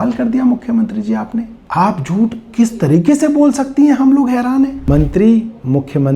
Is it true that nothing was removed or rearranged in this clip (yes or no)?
no